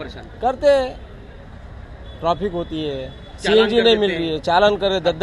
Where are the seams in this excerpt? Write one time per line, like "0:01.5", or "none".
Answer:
none